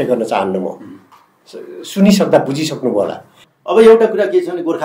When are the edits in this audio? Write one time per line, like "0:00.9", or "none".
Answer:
0:03.4